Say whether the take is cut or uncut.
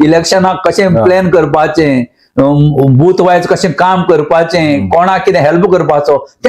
uncut